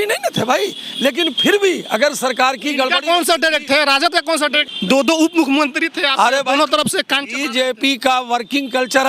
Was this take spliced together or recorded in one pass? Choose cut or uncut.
cut